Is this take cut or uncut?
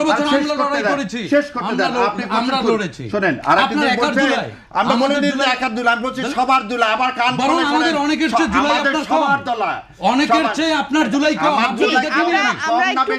uncut